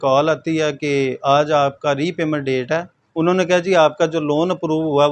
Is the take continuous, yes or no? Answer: no